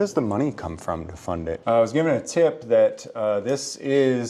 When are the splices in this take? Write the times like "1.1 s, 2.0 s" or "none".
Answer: 1.6 s